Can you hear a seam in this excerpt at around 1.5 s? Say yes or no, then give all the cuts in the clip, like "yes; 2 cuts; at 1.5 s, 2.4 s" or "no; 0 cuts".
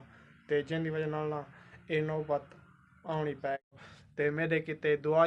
no; 1 cut; at 3.6 s